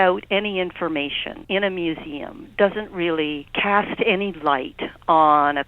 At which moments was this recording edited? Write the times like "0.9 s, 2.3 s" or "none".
1.3 s, 3.5 s